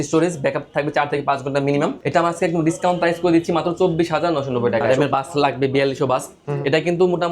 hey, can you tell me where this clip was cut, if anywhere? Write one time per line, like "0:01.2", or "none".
0:02.0
0:04.9